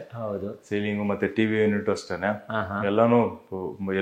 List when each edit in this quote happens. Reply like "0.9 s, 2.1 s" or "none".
none